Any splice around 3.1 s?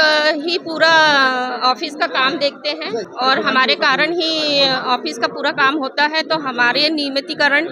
yes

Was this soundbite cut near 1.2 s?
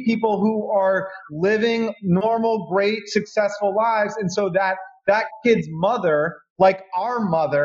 no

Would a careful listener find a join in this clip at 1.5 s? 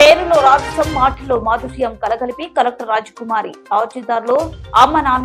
no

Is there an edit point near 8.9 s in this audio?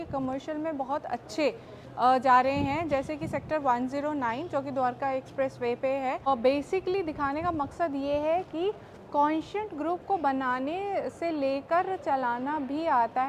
no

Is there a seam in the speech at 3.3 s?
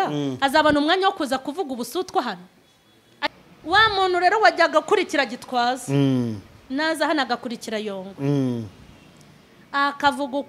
yes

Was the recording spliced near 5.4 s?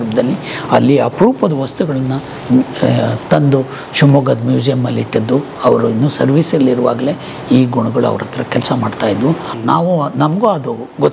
no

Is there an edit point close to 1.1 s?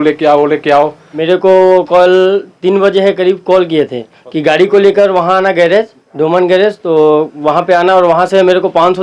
yes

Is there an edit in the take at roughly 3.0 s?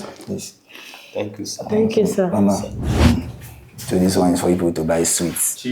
yes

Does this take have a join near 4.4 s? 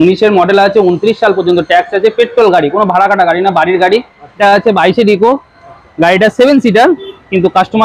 yes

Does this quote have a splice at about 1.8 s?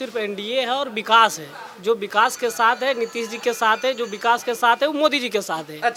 no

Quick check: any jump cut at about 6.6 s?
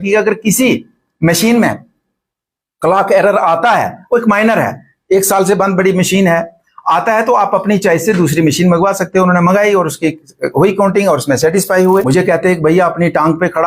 no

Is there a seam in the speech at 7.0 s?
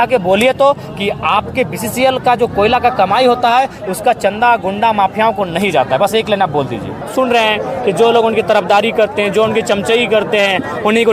yes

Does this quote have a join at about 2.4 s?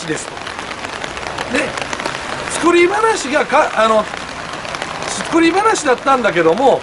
no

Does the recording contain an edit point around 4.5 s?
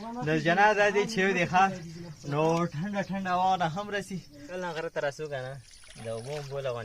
yes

